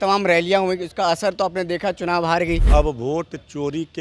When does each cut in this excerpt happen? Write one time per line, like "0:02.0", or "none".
0:02.6